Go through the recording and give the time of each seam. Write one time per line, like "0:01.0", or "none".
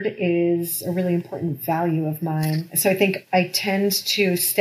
0:02.7